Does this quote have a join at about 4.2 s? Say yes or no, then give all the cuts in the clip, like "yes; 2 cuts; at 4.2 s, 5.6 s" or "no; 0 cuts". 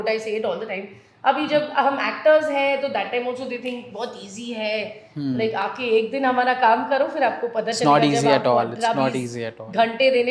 no; 0 cuts